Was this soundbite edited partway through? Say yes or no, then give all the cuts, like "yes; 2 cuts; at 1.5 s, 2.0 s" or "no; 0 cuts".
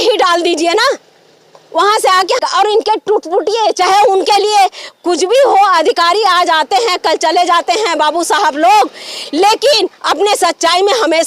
yes; 1 cut; at 2.4 s